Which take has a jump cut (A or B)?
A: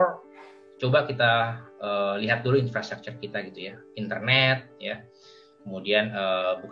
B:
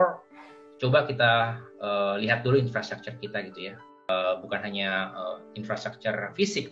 B